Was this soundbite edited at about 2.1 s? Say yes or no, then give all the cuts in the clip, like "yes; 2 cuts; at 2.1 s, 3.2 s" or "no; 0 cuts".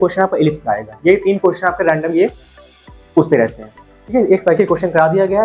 no; 0 cuts